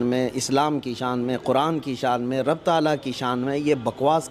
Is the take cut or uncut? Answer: uncut